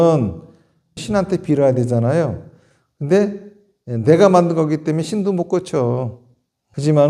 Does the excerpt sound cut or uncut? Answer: cut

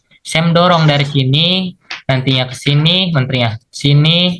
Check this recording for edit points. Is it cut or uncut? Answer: uncut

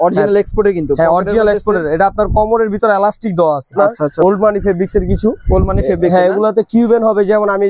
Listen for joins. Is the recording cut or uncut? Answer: cut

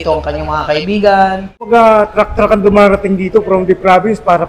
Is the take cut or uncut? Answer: cut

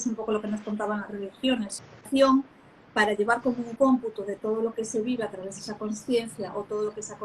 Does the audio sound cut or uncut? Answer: cut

